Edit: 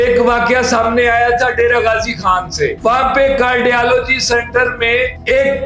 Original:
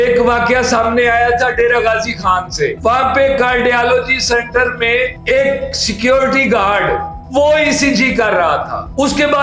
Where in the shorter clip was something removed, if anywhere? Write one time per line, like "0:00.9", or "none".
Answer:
none